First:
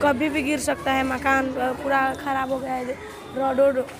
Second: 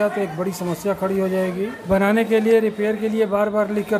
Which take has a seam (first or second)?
second